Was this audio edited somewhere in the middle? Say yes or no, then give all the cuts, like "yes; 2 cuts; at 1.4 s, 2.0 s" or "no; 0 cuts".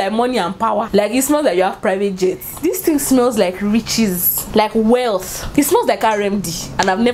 yes; 3 cuts; at 2.6 s, 4.3 s, 5.3 s